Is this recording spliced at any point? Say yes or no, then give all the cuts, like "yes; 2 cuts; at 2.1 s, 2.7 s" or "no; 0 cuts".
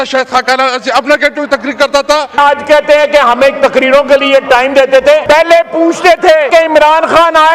yes; 3 cuts; at 2.4 s, 5.2 s, 6.5 s